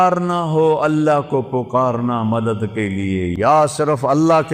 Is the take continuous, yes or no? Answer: no